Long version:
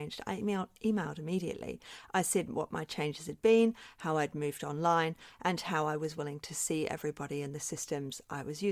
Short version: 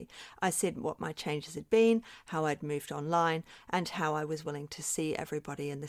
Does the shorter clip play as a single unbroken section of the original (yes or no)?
yes